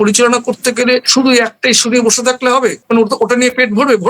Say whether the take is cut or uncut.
cut